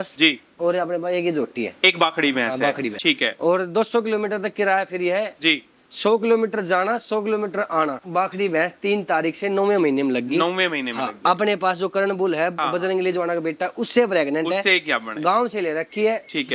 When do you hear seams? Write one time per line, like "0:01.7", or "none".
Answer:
0:03.0
0:08.0